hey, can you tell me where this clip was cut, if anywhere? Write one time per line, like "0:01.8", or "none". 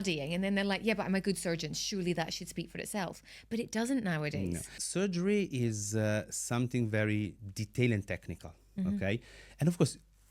0:04.8